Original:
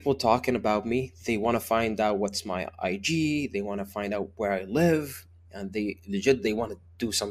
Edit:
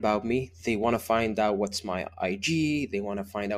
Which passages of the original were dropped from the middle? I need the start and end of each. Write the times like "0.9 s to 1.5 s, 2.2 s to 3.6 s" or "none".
none